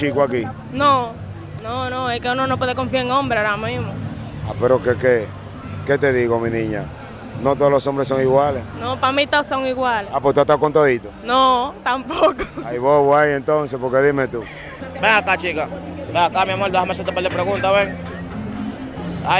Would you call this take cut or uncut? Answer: cut